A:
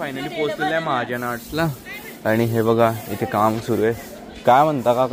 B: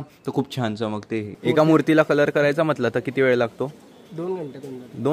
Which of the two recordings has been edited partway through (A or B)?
B